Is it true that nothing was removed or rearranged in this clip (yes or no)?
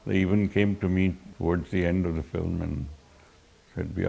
no